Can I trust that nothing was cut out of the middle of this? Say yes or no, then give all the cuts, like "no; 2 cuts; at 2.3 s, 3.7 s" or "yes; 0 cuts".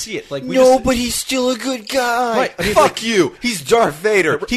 yes; 0 cuts